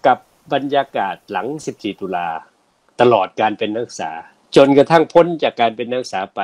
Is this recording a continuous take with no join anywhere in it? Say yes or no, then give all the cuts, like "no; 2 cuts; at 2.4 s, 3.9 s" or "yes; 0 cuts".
yes; 0 cuts